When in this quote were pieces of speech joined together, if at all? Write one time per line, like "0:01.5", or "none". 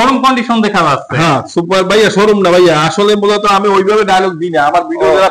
none